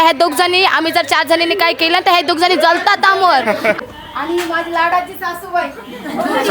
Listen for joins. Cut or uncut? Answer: cut